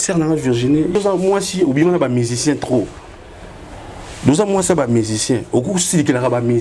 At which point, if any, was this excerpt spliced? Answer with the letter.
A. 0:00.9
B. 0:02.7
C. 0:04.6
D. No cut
A